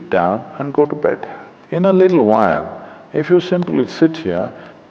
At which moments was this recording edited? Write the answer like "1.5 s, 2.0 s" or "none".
1.0 s